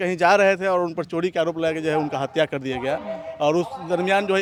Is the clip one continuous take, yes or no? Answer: yes